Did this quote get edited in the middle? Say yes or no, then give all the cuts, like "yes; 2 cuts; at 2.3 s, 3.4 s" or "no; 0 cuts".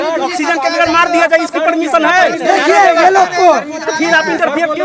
no; 0 cuts